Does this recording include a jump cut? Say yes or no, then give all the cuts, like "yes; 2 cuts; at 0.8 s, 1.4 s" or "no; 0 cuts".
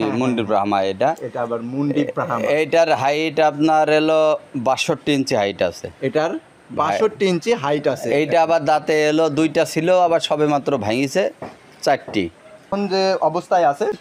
no; 0 cuts